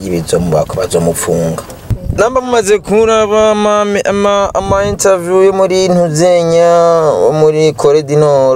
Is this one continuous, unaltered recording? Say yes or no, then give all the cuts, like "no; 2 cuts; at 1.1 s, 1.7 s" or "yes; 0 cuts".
no; 1 cut; at 2.0 s